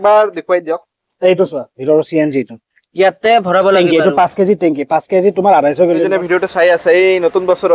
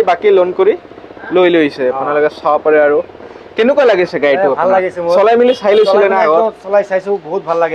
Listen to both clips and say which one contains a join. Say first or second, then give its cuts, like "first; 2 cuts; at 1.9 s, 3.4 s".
first; 1 cut; at 6.1 s